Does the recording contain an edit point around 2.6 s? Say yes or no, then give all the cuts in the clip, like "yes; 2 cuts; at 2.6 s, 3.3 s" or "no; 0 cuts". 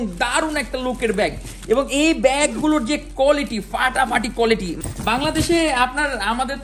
no; 1 cut; at 4.8 s